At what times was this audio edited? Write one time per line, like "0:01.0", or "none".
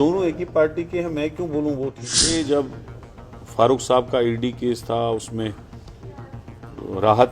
0:02.2